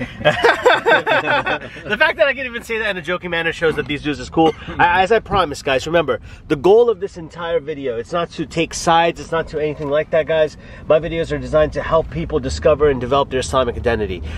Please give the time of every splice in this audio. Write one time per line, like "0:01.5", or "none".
none